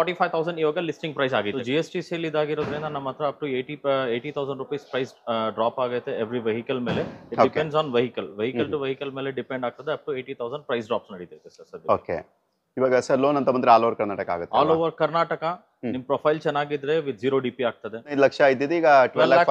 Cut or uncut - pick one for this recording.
cut